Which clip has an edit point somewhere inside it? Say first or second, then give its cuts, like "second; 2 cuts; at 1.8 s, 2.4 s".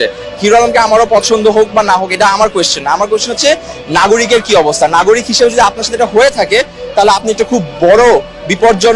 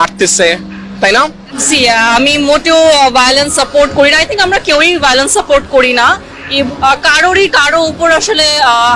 second; 2 cuts; at 1.8 s, 6.7 s